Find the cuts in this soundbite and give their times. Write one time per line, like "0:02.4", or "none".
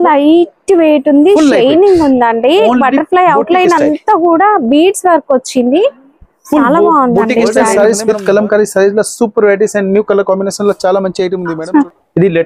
0:07.8
0:11.5